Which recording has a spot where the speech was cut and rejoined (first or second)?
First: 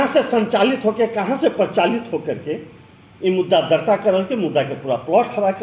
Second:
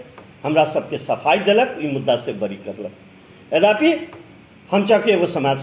first